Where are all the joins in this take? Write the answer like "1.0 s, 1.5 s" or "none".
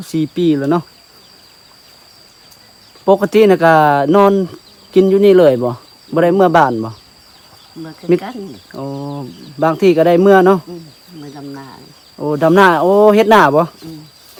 none

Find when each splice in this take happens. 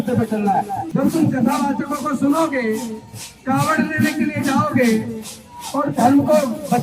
0.9 s

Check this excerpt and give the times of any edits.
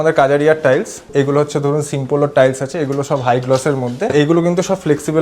1.0 s, 4.1 s

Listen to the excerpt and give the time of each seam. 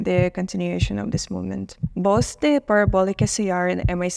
none

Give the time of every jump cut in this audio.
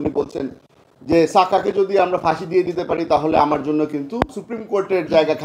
4.5 s

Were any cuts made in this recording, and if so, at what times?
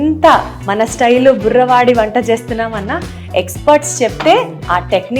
none

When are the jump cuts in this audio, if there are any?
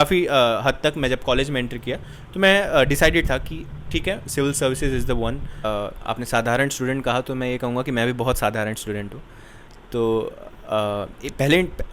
5.6 s

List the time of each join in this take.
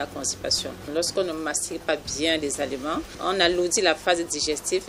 0.9 s, 3.1 s

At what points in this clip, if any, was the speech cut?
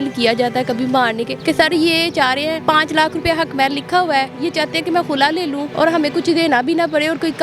1.3 s, 2.6 s, 5.7 s

